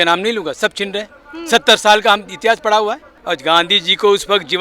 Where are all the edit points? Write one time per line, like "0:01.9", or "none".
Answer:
0:03.1